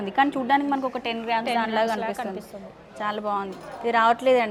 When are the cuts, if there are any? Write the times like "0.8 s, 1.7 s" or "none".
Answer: none